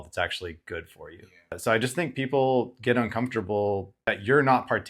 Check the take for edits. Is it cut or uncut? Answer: cut